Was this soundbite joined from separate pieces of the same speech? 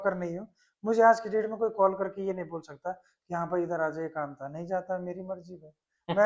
no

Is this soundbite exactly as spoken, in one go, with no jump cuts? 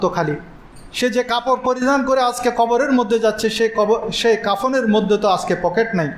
yes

